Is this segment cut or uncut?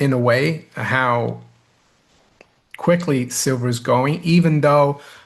uncut